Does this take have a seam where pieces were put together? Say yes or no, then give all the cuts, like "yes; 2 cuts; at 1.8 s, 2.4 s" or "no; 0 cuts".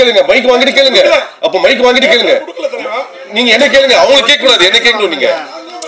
no; 0 cuts